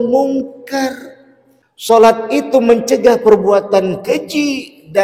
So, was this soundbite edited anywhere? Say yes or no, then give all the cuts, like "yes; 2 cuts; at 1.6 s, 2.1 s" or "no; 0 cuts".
yes; 1 cut; at 1.9 s